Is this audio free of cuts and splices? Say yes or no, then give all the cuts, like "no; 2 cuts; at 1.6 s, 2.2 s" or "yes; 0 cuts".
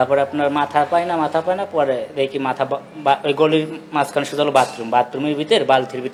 yes; 0 cuts